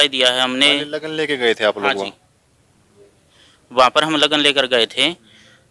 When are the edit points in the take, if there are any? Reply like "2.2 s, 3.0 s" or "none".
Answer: none